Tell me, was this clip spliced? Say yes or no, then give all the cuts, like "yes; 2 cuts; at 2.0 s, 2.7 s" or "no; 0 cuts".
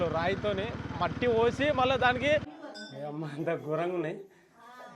yes; 1 cut; at 2.6 s